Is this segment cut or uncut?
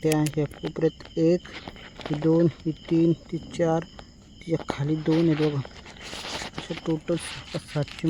uncut